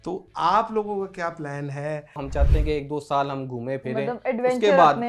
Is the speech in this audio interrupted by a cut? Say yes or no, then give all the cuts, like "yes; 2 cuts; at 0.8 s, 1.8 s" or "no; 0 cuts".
yes; 1 cut; at 2.2 s